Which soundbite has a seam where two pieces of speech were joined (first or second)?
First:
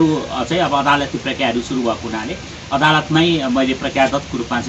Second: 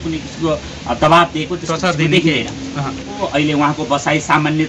second